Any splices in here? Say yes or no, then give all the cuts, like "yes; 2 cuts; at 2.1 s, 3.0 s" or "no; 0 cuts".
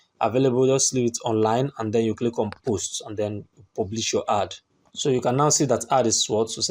no; 0 cuts